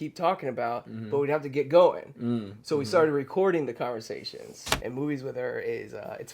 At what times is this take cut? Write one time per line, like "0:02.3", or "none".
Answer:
0:04.6

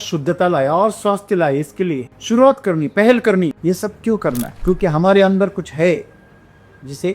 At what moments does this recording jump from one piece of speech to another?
0:02.1
0:03.6
0:04.5

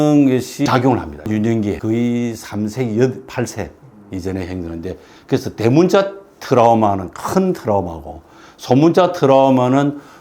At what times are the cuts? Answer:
0:01.2

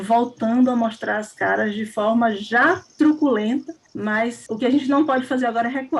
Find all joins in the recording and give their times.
0:04.3

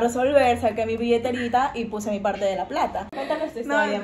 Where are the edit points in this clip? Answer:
0:03.1

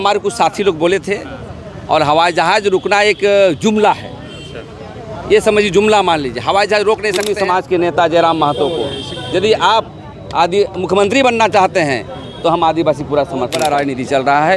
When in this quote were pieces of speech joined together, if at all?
0:07.3
0:13.6

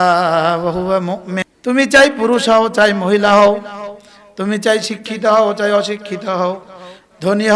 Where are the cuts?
0:01.5

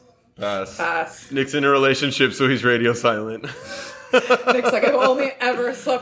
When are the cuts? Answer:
0:01.3

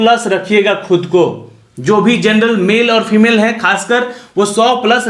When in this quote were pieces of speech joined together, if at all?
none

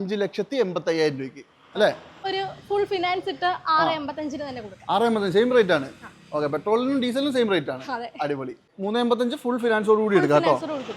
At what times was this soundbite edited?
0:02.1
0:08.6

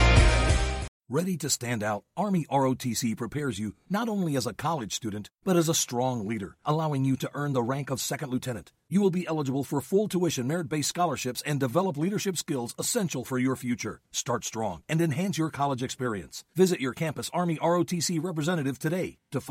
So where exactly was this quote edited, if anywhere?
none

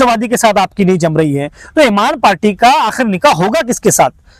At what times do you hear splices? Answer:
none

